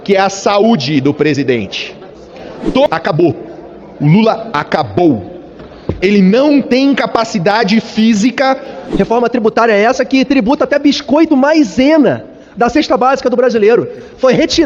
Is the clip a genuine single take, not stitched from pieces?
no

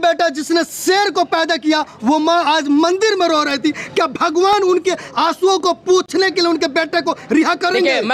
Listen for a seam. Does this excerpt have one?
no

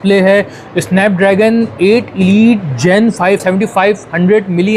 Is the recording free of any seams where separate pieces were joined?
no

